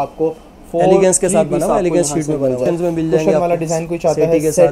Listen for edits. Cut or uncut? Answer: cut